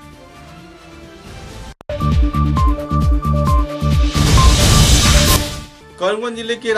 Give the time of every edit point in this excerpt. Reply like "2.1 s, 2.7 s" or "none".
none